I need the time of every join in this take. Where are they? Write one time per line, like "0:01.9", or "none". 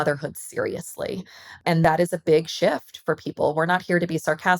0:01.6